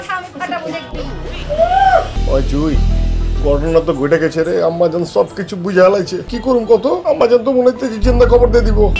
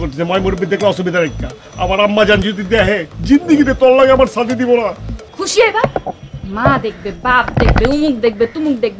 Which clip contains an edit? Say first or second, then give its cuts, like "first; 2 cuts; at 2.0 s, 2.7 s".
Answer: first; 1 cut; at 2.1 s